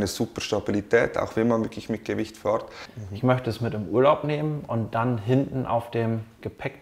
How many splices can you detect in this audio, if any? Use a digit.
1